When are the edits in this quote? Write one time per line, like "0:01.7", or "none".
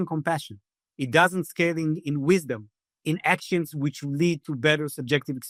none